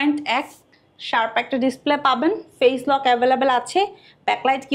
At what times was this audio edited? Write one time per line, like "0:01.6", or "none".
none